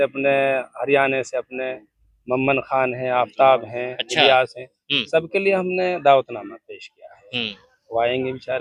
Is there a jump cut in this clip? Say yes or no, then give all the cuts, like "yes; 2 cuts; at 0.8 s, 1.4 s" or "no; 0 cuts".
no; 0 cuts